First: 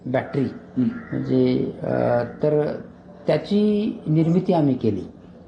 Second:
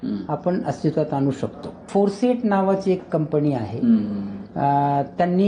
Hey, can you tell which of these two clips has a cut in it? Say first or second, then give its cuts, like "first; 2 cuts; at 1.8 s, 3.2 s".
second; 1 cut; at 1.8 s